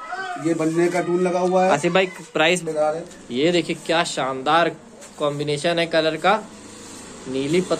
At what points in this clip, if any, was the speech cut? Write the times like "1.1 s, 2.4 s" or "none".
2.6 s